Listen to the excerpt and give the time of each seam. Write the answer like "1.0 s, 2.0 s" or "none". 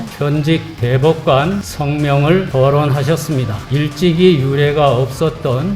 3.7 s